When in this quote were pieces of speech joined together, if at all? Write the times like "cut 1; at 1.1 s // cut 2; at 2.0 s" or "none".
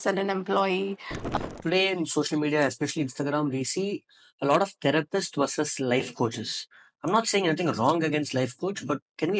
cut 1; at 1.2 s

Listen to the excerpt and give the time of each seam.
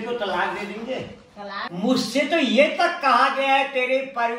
cut 1; at 1.7 s

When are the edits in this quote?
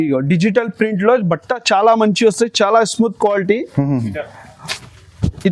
none

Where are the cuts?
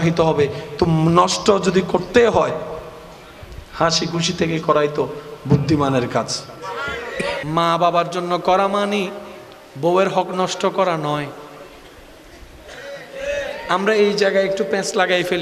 cut 1; at 7.4 s

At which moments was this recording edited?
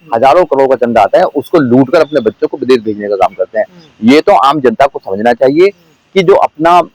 none

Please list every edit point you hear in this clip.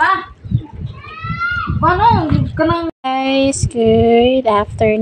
cut 1; at 2.9 s

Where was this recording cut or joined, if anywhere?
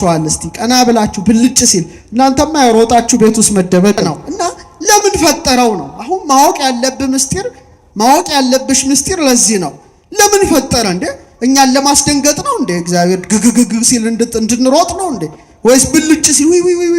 cut 1; at 4.1 s

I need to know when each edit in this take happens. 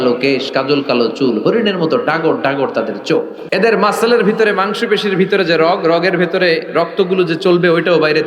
cut 1; at 3.4 s

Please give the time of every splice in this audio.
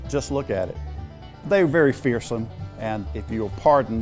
cut 1; at 0.9 s // cut 2; at 2.8 s

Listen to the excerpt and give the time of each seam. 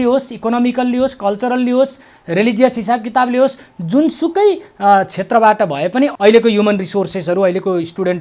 cut 1; at 6.1 s

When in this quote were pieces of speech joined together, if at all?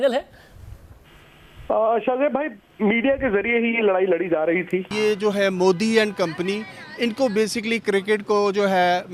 cut 1; at 4.9 s

